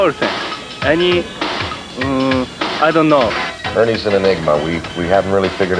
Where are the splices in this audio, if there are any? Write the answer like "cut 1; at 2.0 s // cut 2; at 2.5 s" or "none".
cut 1; at 3.4 s